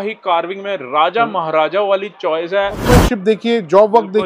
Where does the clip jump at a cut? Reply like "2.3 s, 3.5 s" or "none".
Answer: 2.8 s